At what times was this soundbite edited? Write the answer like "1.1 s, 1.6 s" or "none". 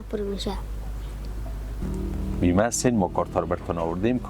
1.8 s